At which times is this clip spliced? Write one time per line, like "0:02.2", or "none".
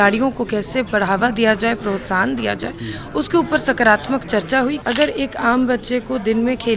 0:04.8